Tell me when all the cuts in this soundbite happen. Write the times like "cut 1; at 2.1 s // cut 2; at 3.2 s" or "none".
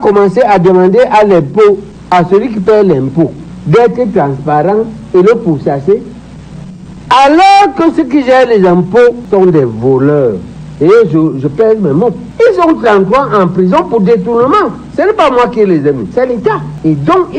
none